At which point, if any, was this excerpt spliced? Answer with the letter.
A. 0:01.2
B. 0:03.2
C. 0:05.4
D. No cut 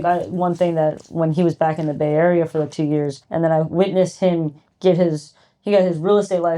B